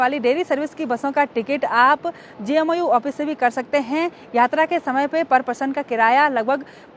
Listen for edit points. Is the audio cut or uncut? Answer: uncut